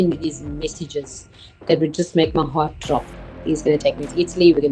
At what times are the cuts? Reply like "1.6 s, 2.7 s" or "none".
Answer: 3.3 s